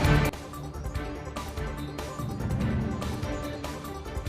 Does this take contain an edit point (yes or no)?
yes